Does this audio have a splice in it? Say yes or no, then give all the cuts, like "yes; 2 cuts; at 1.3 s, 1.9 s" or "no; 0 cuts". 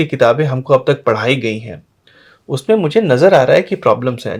no; 0 cuts